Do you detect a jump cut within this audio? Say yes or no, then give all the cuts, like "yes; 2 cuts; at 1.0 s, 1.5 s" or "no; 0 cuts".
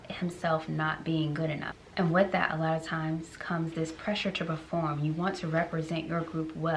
yes; 1 cut; at 1.7 s